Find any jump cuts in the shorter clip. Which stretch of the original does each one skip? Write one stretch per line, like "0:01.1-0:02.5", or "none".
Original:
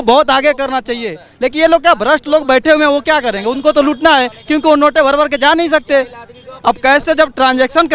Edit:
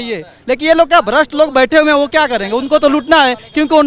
none